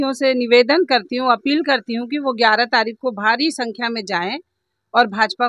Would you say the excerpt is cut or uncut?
uncut